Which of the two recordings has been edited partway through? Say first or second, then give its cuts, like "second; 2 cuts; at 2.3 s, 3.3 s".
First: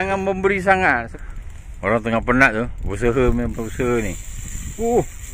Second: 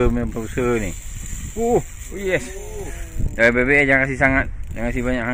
first; 1 cut; at 1.1 s